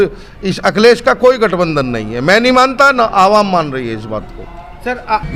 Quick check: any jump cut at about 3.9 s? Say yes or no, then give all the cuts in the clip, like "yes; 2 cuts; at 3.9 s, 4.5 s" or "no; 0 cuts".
no; 0 cuts